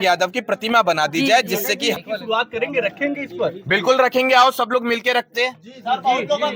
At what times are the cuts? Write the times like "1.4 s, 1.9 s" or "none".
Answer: 2.0 s